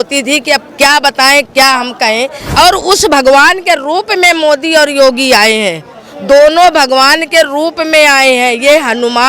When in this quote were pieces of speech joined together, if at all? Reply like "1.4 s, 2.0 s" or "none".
2.4 s